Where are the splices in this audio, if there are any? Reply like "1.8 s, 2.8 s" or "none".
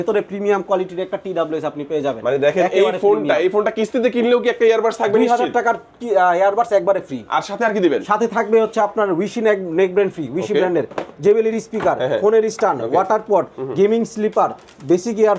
none